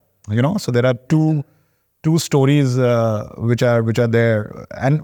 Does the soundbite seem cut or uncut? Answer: uncut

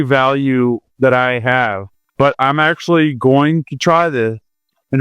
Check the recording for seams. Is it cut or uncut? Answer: cut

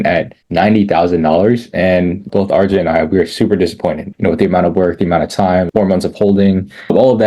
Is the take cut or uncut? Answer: cut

